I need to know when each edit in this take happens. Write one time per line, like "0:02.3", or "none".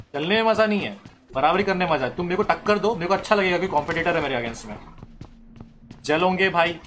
none